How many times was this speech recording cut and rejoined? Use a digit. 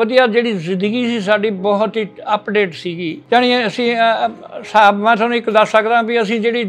1